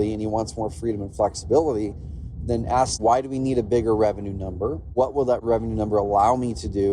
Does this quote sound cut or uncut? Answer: cut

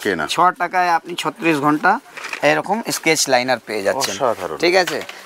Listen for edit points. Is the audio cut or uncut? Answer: uncut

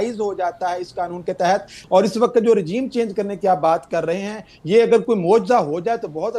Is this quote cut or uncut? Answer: cut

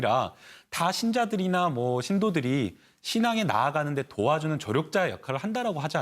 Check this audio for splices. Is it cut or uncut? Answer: cut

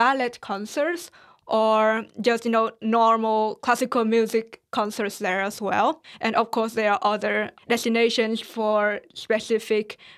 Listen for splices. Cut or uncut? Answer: cut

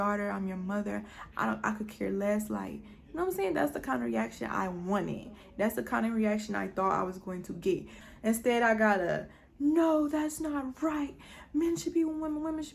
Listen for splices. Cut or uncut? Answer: cut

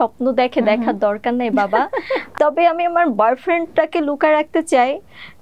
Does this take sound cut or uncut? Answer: cut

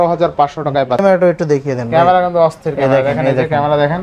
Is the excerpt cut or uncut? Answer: cut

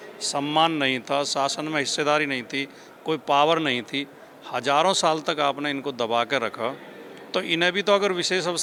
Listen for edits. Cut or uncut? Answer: uncut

